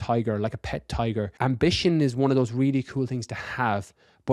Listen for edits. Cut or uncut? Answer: cut